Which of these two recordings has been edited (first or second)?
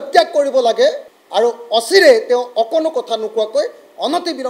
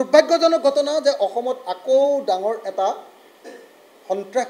first